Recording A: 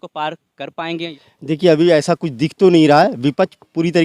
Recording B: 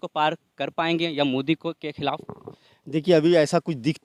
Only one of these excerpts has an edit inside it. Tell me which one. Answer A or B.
A